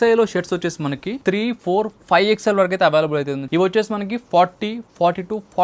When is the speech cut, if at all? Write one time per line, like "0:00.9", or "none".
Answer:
0:01.1
0:03.4